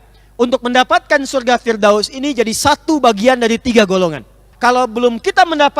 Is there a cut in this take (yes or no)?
yes